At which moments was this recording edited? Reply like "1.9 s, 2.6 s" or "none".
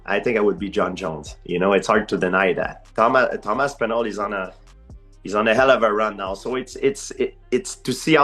2.8 s